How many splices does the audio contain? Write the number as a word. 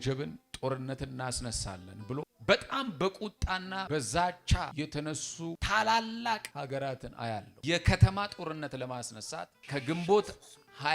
six